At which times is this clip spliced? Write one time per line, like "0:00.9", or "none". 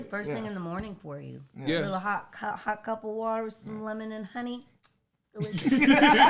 none